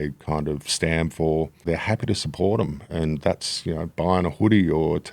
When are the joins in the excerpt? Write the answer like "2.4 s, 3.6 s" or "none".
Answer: 1.6 s